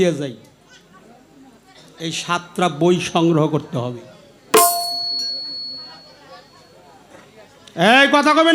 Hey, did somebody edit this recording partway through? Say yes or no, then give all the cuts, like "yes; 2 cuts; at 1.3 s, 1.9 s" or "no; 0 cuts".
no; 0 cuts